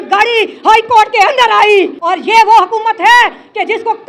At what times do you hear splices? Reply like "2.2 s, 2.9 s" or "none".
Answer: 2.0 s